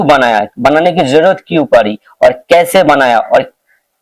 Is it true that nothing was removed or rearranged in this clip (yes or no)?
yes